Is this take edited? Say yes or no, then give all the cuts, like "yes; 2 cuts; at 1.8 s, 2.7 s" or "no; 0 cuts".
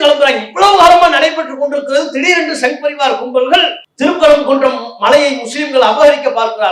yes; 1 cut; at 3.8 s